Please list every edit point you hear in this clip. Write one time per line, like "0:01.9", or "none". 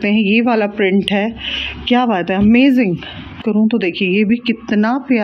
0:03.4